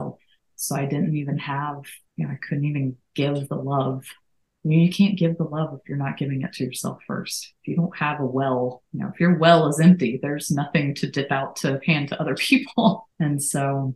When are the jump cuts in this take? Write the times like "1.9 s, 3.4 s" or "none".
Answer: 1.9 s, 8.9 s, 13.1 s